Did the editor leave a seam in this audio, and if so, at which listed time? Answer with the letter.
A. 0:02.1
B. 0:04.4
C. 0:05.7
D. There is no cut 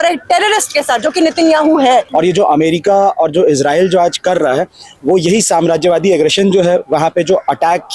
A